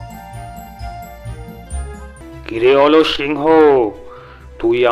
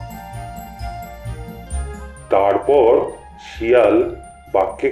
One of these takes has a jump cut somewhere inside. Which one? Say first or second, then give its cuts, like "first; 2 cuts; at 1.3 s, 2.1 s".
first; 1 cut; at 2.2 s